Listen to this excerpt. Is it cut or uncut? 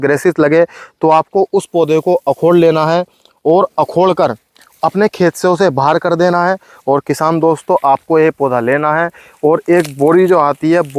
uncut